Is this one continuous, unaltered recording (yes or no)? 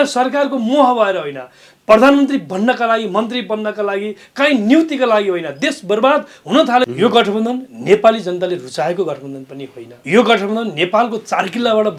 no